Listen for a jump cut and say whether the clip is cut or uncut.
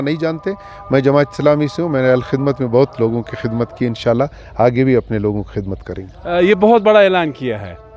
uncut